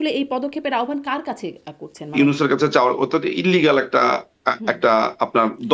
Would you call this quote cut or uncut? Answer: cut